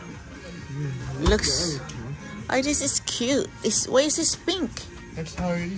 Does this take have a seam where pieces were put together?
no; 0 cuts

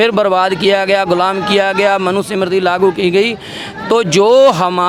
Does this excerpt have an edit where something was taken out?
no; 0 cuts

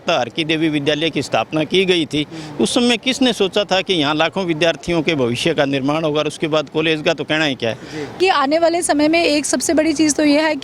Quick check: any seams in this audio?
yes; 1 cut; at 8.2 s

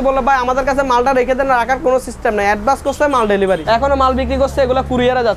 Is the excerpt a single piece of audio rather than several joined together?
no; 1 cut; at 3.6 s

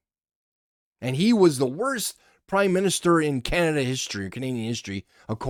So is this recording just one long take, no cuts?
yes; 0 cuts

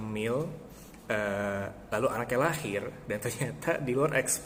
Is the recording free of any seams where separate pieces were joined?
yes; 0 cuts

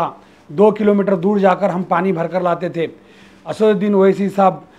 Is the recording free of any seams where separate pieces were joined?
yes; 0 cuts

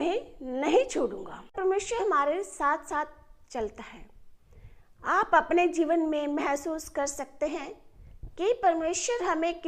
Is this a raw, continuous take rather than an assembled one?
no; 1 cut; at 1.5 s

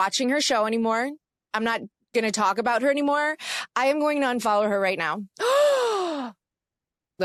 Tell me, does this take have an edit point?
no; 0 cuts

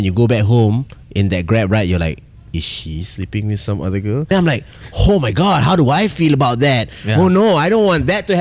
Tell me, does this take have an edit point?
yes; 1 cut; at 4.3 s

